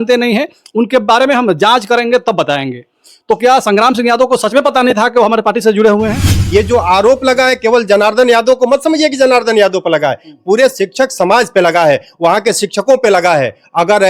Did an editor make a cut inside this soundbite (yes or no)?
yes